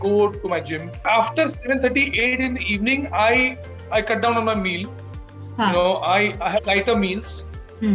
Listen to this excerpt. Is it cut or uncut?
cut